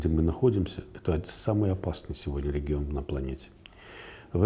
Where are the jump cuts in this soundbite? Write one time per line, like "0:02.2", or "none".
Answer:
none